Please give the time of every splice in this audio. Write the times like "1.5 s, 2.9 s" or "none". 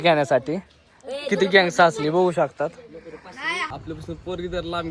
3.7 s